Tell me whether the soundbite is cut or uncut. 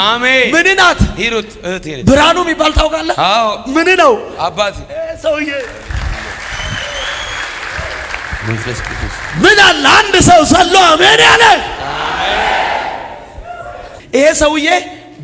cut